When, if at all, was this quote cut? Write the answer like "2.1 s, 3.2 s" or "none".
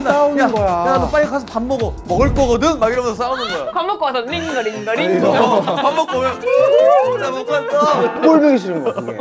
none